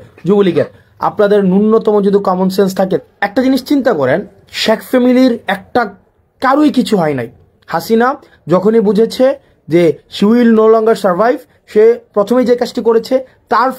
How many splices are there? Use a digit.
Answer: 1